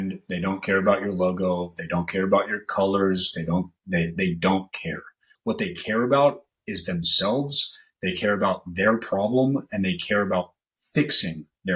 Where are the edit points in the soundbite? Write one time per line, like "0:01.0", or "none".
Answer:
0:05.3